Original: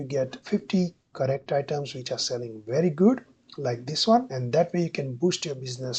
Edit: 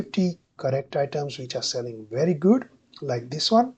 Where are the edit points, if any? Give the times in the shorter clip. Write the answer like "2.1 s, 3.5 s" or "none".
none